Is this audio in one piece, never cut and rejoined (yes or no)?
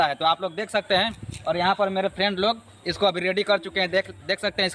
yes